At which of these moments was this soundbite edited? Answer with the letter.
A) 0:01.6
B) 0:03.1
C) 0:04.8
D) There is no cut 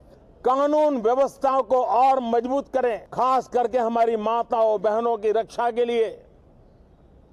B